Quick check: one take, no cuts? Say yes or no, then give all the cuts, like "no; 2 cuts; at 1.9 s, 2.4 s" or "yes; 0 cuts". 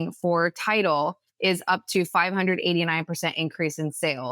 yes; 0 cuts